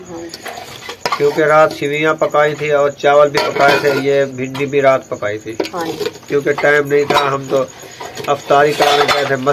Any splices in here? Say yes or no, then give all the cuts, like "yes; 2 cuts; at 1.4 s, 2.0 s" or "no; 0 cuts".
no; 0 cuts